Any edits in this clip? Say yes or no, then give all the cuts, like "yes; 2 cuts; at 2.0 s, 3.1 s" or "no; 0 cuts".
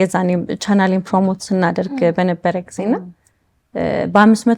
no; 0 cuts